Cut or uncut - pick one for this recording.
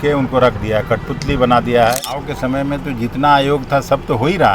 cut